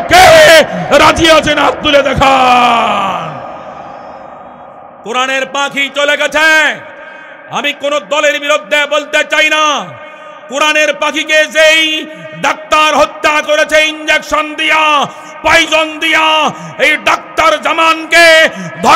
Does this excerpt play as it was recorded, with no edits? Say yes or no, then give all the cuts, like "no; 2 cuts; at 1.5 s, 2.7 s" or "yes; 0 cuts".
no; 1 cut; at 4.8 s